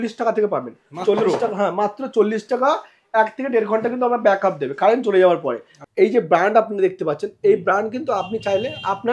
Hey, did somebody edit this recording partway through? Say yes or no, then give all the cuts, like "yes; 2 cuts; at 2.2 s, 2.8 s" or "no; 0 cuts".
yes; 1 cut; at 5.7 s